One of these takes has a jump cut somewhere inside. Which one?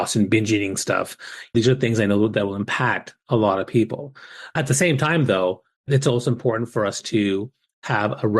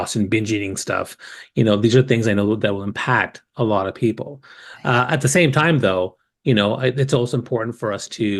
first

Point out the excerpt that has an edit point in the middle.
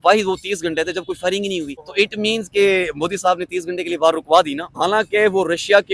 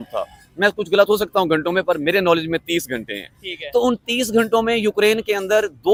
first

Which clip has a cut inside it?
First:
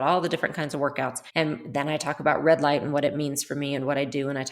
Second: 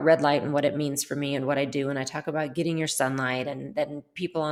first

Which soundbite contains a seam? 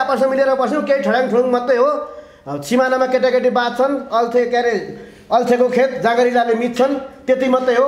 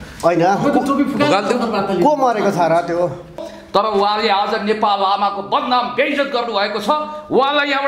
second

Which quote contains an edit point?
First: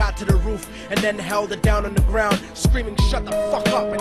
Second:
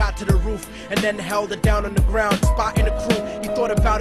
second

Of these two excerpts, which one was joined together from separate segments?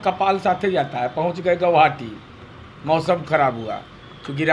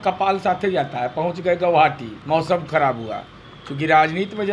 second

